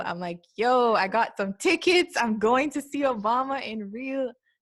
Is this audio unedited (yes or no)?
yes